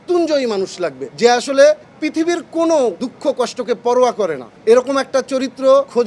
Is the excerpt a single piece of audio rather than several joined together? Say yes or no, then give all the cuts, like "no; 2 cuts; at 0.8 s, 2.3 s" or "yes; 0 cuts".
yes; 0 cuts